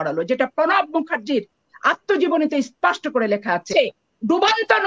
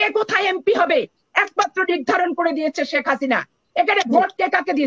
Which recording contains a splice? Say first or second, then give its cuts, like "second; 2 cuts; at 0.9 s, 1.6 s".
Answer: first; 1 cut; at 3.7 s